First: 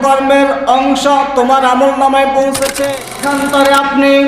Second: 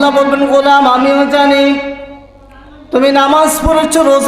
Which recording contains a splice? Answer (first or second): first